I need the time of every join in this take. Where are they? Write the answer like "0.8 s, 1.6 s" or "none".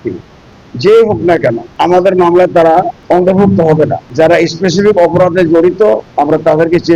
1.7 s, 3.0 s, 4.0 s, 6.1 s